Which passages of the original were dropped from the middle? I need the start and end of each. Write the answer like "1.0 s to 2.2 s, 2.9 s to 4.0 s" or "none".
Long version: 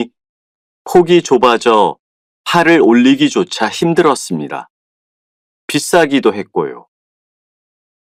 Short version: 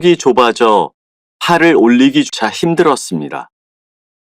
3.3 s to 3.5 s